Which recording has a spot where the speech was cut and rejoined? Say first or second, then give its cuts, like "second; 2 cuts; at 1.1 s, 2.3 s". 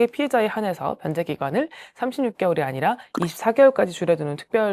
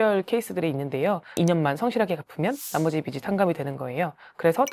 second; 1 cut; at 1.4 s